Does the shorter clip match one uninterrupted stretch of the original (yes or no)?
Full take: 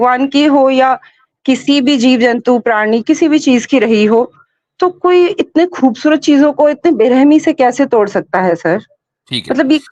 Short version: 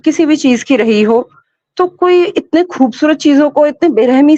yes